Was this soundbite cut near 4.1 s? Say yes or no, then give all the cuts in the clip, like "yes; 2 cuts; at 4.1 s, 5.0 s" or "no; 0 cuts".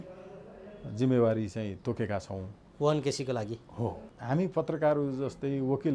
yes; 1 cut; at 4.1 s